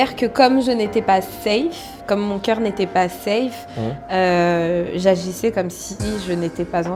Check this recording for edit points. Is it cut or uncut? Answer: uncut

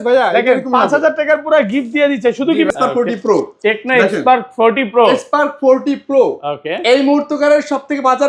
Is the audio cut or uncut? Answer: cut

